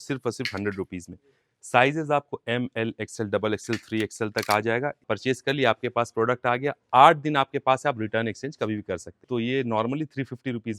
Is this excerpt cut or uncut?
cut